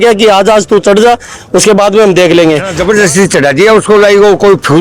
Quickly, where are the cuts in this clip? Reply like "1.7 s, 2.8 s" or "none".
2.7 s